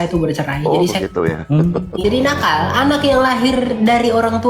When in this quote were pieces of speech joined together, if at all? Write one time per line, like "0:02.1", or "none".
0:02.0